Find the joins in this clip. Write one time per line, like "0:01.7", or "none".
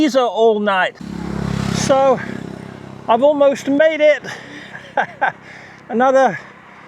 0:01.0